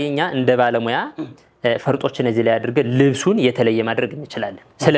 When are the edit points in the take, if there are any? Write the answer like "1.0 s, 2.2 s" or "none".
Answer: none